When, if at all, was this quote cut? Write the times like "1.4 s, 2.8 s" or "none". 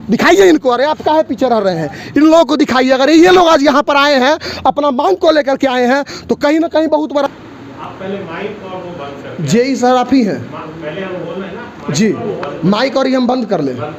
7.3 s